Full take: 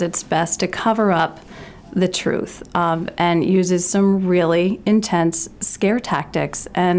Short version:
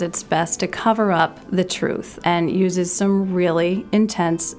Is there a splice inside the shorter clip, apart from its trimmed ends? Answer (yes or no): yes